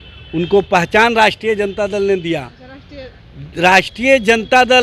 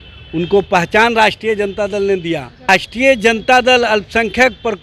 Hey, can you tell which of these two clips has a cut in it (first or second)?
second